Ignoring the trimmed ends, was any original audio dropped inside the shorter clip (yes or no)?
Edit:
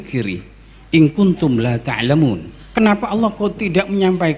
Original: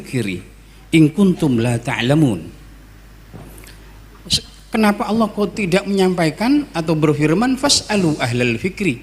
yes